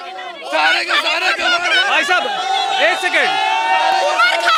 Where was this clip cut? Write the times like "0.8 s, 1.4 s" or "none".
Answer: none